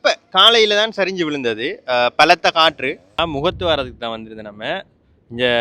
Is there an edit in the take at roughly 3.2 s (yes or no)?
yes